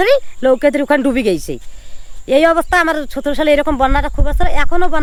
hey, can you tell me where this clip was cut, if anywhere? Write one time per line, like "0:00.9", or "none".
none